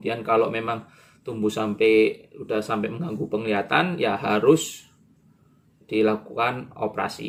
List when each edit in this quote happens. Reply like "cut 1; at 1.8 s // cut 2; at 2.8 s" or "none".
none